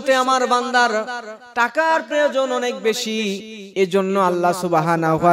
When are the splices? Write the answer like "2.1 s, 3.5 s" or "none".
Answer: none